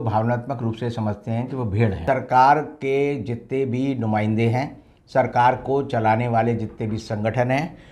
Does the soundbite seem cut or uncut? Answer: cut